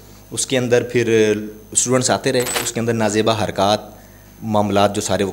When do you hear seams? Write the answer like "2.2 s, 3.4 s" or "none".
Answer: 2.7 s